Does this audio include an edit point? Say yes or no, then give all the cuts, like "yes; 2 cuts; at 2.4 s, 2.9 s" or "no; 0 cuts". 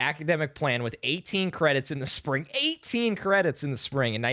no; 0 cuts